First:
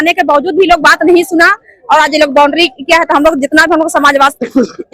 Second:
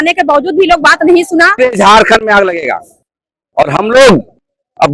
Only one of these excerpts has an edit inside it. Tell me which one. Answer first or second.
second